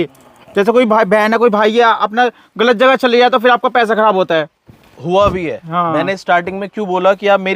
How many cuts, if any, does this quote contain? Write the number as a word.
zero